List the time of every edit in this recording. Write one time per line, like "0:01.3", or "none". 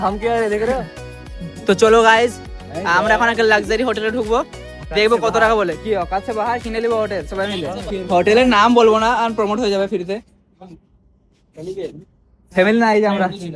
none